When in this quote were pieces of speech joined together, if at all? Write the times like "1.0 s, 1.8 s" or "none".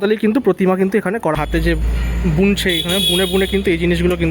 1.4 s